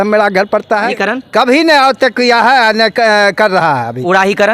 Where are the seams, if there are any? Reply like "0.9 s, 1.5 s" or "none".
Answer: 0.9 s